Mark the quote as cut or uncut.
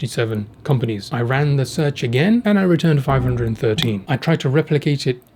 cut